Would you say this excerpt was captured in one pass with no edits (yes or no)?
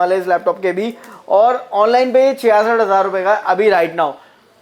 yes